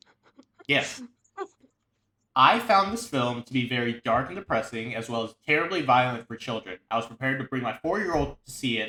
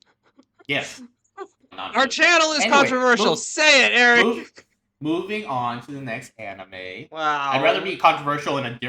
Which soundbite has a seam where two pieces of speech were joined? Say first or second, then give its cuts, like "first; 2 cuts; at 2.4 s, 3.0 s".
second; 1 cut; at 1.7 s